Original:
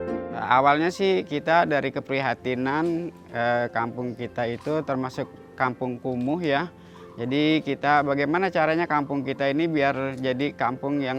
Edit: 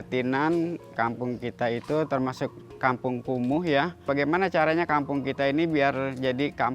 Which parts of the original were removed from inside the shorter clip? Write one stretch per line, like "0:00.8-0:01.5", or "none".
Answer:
0:03.3-0:03.7
0:06.8-0:08.1